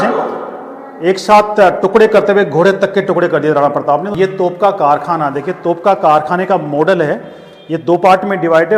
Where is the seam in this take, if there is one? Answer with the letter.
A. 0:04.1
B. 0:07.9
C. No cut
A